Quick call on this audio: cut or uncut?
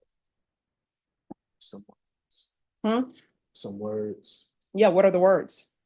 uncut